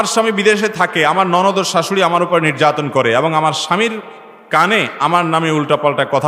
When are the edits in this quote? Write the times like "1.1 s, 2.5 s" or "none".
none